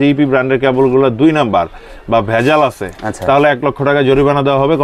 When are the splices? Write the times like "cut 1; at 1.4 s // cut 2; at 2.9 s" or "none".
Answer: none